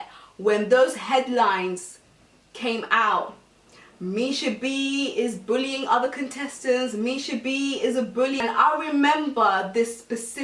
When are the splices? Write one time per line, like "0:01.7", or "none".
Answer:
0:08.4